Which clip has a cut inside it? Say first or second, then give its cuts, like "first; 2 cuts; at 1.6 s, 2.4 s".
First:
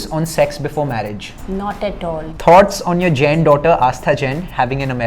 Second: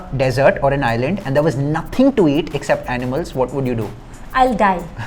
first; 2 cuts; at 1.3 s, 2.4 s